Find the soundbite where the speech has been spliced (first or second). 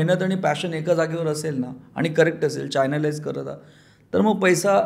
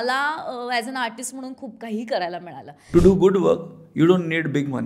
second